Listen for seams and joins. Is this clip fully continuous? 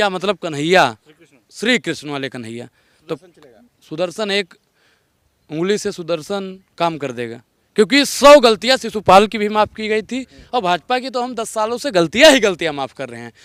yes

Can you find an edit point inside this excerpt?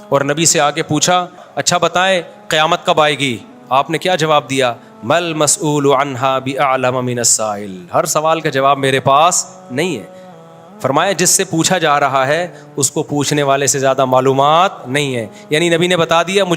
yes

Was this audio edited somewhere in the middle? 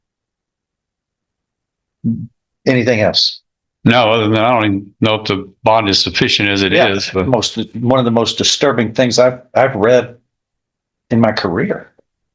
no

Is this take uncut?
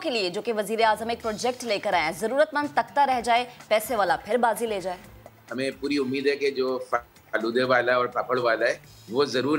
no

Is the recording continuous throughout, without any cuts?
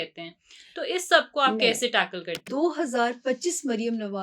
no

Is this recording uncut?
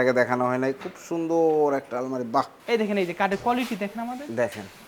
no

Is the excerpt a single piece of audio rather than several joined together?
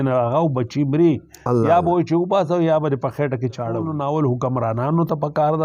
no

